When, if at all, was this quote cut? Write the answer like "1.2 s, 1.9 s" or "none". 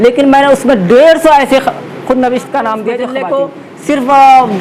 3.2 s